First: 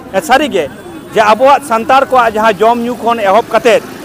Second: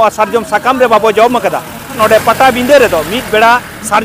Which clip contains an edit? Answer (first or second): second